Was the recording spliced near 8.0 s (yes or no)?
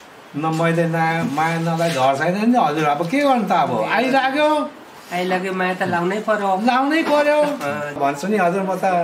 yes